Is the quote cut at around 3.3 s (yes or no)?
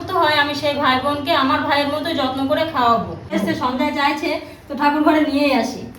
yes